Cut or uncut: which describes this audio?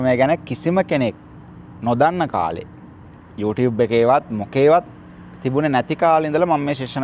uncut